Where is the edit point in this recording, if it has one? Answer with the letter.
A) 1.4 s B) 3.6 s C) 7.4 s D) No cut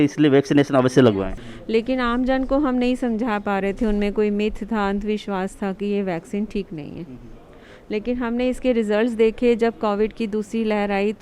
A